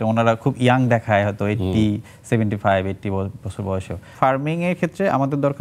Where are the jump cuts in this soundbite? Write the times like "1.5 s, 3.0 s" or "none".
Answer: 4.1 s